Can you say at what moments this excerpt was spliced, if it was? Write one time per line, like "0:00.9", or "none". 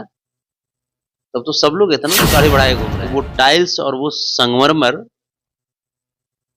0:02.9